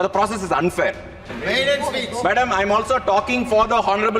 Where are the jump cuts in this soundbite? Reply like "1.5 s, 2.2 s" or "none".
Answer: 1.3 s